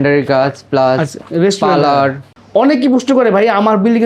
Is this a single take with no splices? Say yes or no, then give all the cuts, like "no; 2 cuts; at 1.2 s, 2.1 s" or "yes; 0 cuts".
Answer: no; 2 cuts; at 1.2 s, 2.3 s